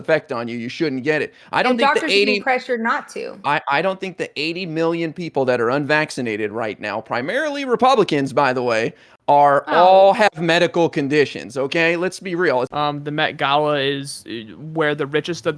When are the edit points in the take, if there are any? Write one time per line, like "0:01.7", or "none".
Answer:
0:12.7